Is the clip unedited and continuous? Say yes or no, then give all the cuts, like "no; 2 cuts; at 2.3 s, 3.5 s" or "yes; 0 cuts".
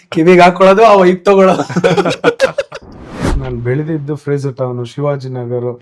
no; 1 cut; at 3.4 s